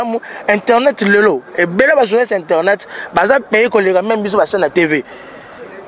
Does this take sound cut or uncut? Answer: uncut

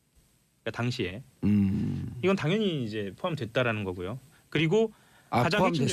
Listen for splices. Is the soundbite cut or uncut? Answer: uncut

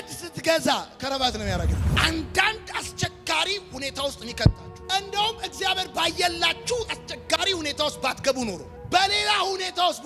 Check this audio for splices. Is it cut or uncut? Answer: cut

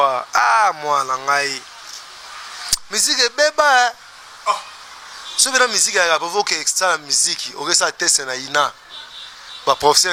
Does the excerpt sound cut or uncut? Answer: uncut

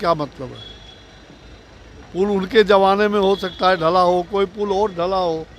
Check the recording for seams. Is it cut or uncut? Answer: uncut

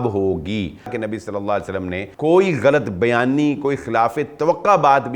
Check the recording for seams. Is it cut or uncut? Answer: cut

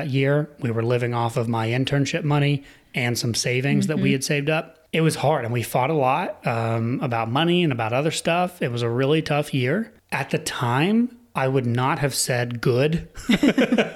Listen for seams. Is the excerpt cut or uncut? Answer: cut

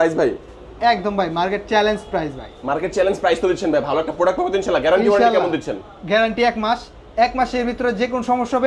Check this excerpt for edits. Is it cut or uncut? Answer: uncut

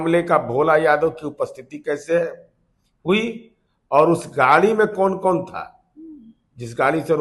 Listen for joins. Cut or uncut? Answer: uncut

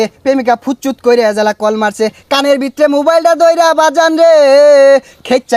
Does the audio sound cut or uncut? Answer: uncut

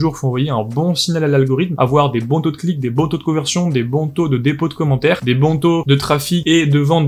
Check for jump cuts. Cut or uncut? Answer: uncut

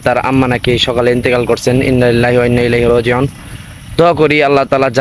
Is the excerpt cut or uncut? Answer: uncut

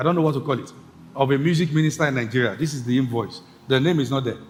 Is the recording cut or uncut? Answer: uncut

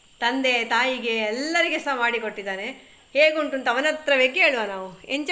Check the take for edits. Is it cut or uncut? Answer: uncut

